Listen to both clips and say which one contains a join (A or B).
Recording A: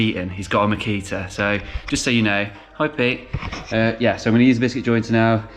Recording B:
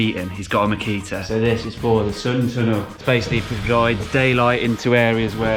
B